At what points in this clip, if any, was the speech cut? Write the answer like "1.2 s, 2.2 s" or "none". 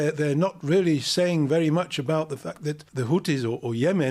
2.8 s